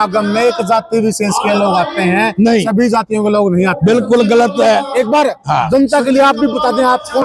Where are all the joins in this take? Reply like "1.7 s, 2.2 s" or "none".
none